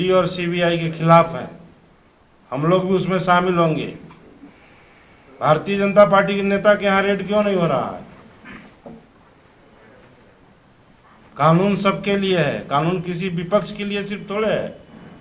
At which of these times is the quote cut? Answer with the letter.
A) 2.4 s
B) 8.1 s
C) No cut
C